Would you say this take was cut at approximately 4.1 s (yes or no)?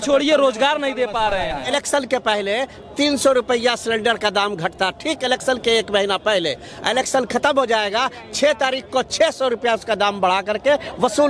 no